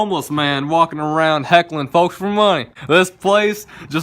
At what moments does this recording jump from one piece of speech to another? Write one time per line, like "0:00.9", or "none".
0:02.7